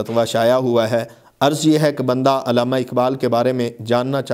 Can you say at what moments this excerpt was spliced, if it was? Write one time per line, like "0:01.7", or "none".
none